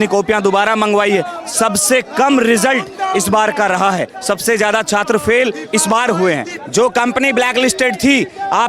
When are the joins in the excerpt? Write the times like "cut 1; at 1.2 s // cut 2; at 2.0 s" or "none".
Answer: cut 1; at 6.5 s